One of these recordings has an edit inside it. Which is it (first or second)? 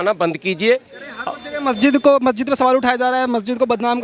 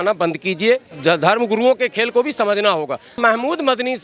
second